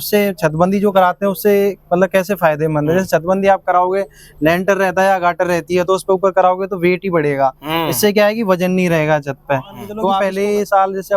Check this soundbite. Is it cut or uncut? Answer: cut